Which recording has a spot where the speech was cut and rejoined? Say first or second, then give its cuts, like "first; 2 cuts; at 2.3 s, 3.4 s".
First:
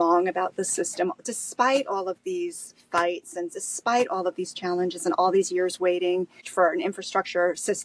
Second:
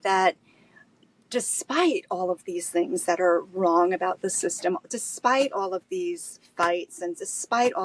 first; 1 cut; at 6.4 s